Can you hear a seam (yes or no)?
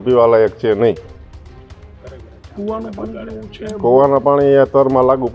no